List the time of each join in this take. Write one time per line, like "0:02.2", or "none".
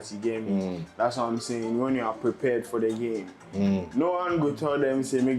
none